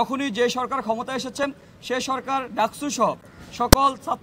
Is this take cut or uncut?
uncut